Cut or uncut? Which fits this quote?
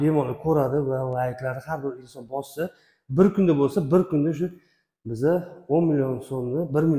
uncut